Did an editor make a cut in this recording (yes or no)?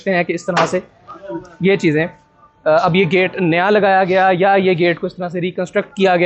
no